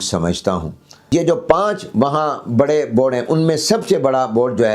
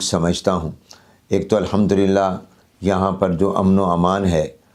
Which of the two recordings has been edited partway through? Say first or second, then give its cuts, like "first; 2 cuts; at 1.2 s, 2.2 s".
first; 1 cut; at 1.1 s